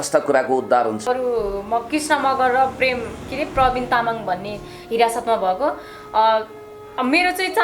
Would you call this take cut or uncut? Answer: cut